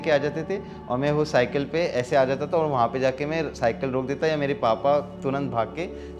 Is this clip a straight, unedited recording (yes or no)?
yes